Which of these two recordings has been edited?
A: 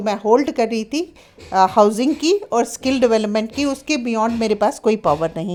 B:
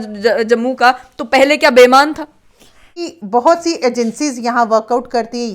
B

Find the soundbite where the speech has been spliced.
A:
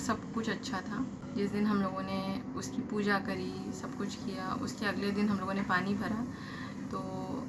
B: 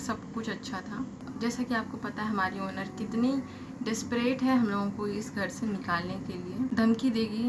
B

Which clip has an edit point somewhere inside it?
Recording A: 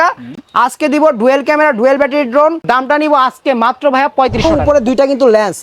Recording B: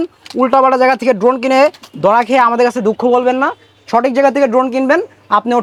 A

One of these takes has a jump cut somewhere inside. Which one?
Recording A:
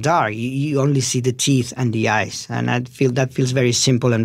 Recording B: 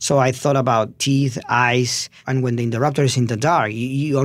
B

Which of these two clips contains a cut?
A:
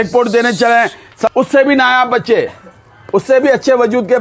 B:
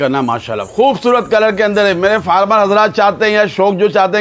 A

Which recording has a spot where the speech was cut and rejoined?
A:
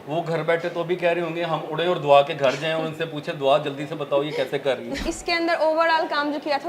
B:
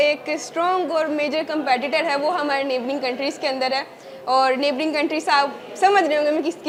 A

